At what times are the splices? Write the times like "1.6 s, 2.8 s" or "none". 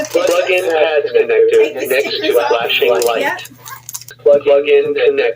4.1 s